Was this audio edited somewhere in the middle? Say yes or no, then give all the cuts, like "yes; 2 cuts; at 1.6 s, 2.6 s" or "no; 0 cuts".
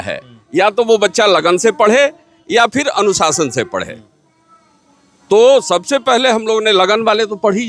no; 0 cuts